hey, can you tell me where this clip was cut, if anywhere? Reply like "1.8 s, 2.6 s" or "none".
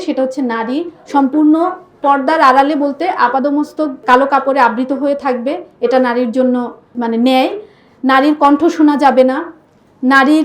1.0 s

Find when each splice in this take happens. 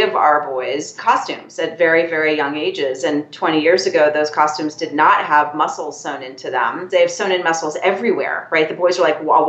0.9 s, 6.8 s

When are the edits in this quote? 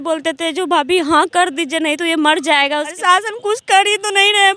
3.0 s

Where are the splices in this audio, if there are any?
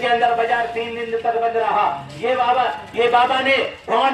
none

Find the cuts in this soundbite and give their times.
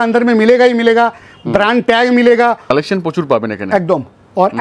2.6 s

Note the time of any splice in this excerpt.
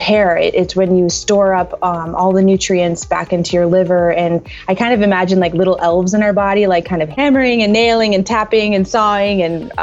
7.0 s

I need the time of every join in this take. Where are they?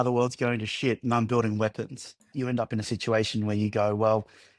2.3 s

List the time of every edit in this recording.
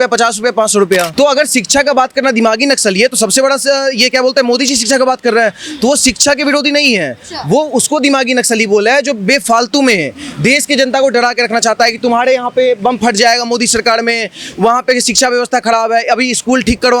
1.1 s

